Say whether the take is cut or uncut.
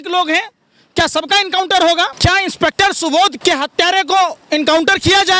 cut